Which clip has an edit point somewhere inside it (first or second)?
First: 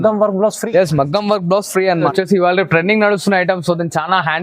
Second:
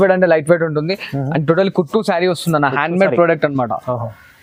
first